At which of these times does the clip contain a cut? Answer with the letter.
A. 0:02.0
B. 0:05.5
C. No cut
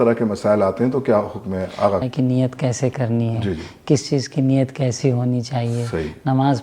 A